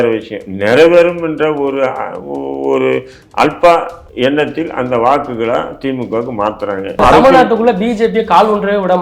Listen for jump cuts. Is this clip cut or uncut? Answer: cut